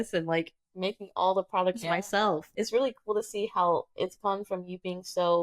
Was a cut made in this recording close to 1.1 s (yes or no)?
no